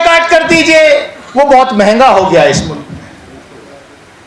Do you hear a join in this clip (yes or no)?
yes